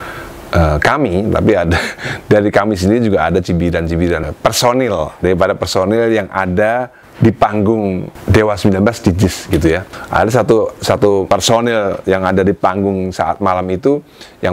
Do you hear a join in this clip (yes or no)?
yes